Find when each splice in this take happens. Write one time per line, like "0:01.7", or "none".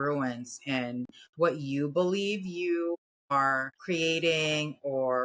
0:03.3